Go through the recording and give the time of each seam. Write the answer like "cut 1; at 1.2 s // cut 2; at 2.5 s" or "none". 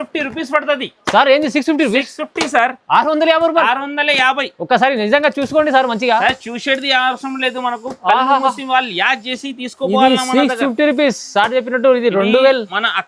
none